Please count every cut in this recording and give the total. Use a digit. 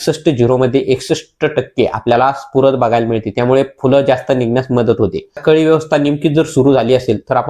1